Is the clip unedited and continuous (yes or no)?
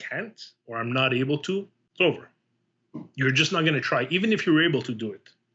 no